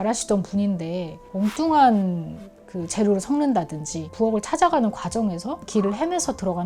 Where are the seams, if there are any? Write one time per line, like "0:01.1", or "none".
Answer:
none